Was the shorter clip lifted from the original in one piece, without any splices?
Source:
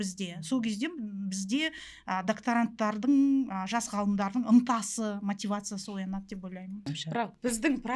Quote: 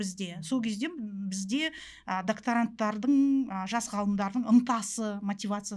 yes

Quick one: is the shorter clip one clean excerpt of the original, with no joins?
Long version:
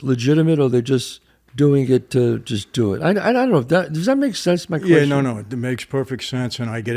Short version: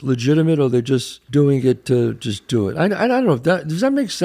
no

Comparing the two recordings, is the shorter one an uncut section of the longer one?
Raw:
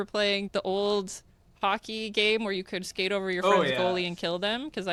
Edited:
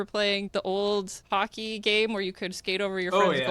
no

